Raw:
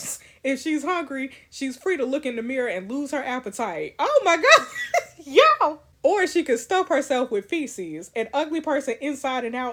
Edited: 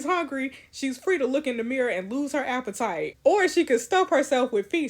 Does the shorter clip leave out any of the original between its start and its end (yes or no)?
yes